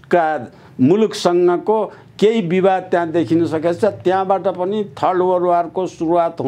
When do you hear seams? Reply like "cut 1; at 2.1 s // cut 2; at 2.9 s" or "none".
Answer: none